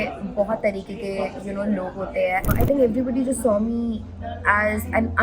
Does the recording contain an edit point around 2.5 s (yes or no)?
yes